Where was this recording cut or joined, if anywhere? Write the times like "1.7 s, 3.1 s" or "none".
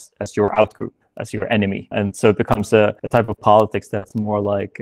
1.9 s, 3.0 s